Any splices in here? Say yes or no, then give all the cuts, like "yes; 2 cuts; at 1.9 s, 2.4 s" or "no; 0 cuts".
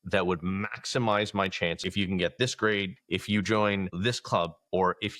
yes; 2 cuts; at 1.8 s, 3.0 s